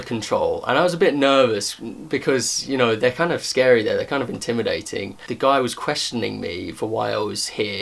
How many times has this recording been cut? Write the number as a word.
one